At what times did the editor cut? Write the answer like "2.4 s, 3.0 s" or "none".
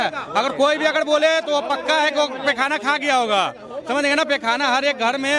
none